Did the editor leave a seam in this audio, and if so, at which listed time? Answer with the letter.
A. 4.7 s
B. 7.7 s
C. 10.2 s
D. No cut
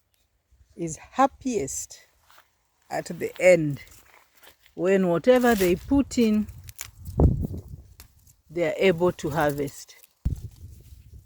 C